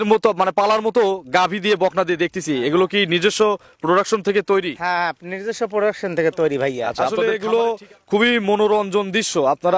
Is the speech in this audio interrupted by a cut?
yes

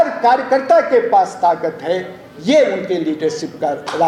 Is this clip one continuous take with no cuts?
yes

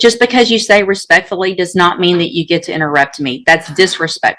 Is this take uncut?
yes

